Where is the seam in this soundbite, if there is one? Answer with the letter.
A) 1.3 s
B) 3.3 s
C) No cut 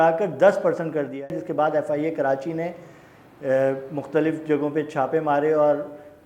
A